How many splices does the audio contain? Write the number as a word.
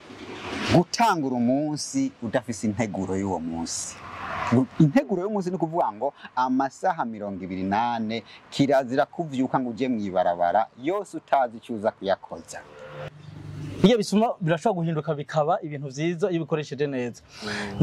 one